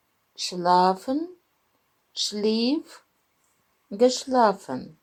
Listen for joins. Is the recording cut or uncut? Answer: uncut